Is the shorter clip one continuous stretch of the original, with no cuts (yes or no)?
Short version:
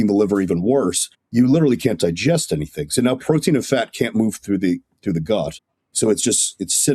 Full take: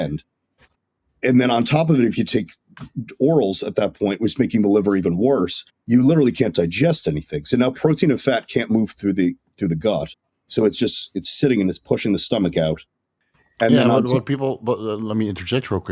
yes